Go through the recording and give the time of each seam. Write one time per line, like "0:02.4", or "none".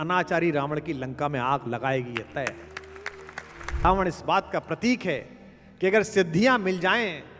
0:03.8